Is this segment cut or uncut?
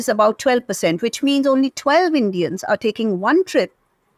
uncut